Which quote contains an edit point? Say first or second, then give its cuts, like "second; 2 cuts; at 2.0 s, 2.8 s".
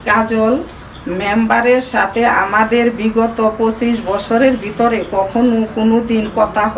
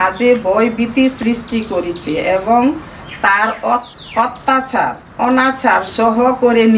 second; 2 cuts; at 4.0 s, 5.0 s